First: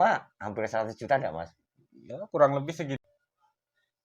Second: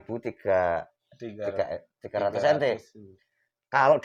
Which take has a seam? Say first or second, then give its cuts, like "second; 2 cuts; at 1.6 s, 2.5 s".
first; 1 cut; at 3.0 s